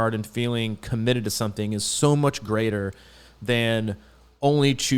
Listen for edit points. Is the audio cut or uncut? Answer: uncut